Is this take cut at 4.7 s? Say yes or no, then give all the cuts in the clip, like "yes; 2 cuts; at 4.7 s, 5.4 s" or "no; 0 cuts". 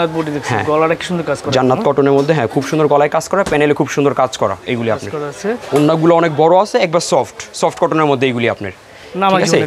no; 0 cuts